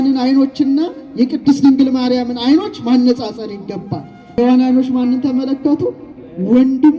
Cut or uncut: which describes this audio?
cut